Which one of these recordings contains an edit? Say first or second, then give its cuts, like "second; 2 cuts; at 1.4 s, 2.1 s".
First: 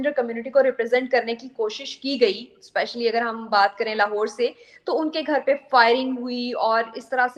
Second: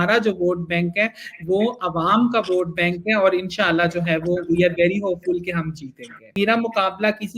second; 1 cut; at 6.3 s